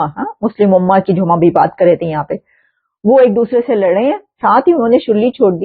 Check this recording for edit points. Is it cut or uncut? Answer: cut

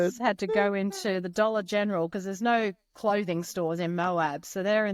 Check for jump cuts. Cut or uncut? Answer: uncut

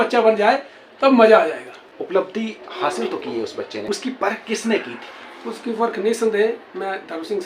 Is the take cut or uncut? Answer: cut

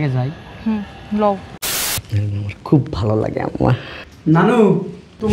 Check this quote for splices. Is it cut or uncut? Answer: cut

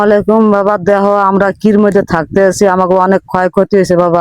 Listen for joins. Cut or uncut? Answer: uncut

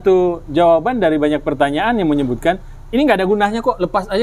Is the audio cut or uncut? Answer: uncut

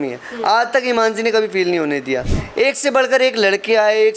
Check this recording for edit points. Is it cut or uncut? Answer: cut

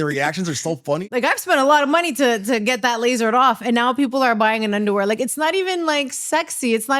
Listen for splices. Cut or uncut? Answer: cut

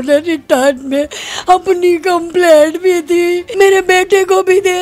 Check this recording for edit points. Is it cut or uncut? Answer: cut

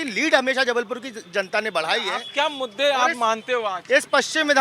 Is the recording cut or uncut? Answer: uncut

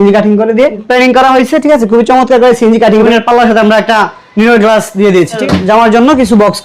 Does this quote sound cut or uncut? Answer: cut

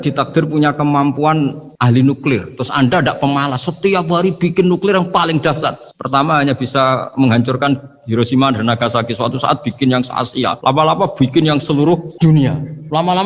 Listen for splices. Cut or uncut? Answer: cut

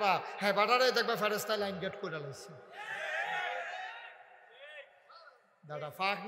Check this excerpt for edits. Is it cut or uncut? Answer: uncut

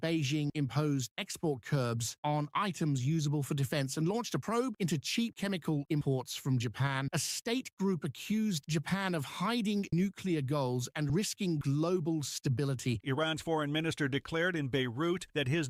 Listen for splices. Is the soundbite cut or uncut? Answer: uncut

